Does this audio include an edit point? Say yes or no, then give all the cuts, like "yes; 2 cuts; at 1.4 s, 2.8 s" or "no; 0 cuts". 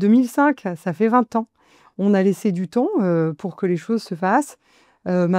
no; 0 cuts